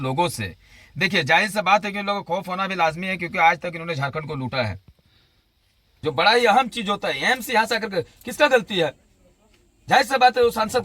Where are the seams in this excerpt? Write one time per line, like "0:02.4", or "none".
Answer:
0:05.9